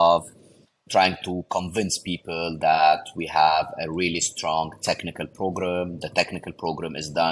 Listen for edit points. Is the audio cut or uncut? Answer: uncut